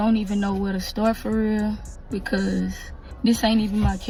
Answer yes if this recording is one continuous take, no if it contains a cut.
yes